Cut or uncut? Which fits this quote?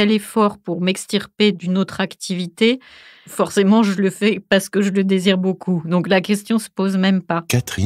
uncut